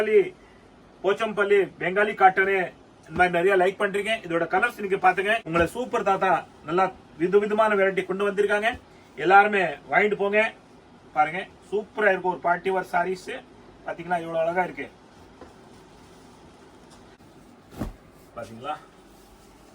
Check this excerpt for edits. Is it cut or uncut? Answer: cut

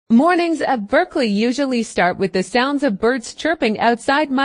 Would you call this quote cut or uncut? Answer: uncut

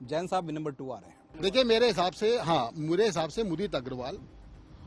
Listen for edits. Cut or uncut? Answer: cut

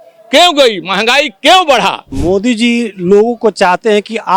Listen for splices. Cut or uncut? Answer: cut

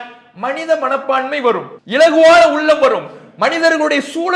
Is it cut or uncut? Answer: cut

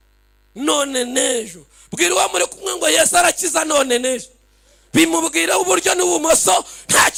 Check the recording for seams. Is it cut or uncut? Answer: uncut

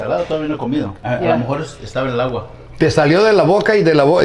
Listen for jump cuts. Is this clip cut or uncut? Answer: cut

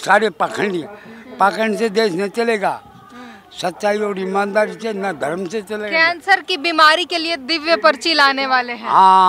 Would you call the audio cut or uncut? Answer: uncut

